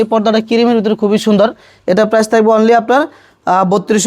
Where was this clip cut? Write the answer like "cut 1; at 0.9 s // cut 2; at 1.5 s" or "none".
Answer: none